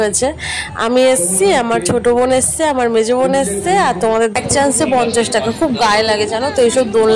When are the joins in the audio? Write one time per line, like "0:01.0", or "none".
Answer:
0:04.4